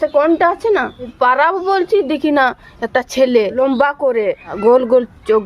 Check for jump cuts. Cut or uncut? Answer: cut